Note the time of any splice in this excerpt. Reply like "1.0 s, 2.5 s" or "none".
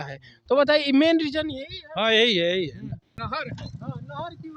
3.2 s

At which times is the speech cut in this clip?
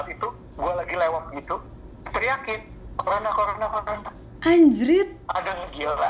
none

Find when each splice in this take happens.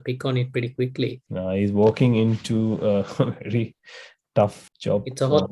1.2 s, 4.6 s

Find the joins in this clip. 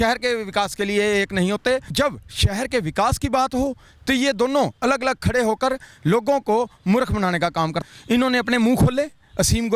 1.9 s, 7.8 s

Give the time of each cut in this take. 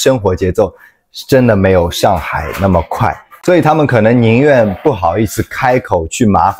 3.4 s

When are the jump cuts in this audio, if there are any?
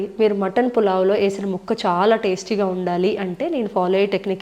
none

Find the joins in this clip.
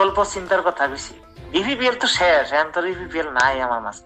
1.6 s

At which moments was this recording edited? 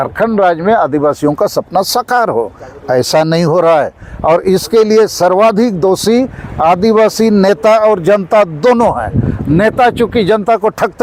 none

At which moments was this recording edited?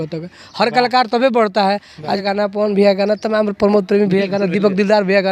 2.2 s

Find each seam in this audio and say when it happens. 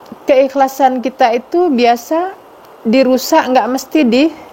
none

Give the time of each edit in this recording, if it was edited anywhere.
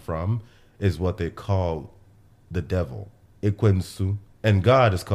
4.2 s

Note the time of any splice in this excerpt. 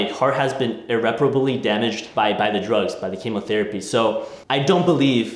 2.0 s, 4.4 s

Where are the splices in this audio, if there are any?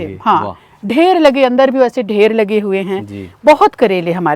none

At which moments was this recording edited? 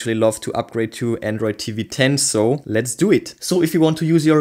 3.4 s

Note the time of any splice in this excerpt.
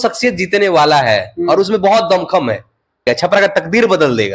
3.0 s

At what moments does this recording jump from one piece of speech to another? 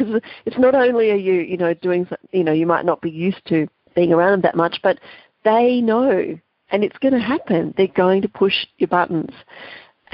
3.8 s

